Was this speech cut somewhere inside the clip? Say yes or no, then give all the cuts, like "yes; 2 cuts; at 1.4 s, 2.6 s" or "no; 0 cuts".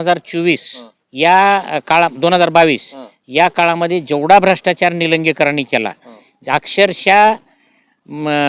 no; 0 cuts